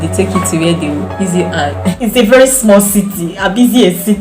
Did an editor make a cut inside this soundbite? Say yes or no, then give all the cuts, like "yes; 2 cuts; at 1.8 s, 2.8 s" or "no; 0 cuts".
yes; 1 cut; at 1.9 s